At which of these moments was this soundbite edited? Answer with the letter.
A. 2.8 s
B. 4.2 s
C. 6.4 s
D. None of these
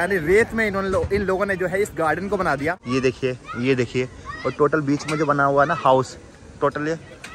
A